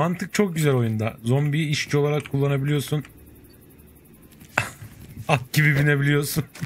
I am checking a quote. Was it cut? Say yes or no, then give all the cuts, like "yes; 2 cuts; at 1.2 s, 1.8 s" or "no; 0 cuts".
no; 0 cuts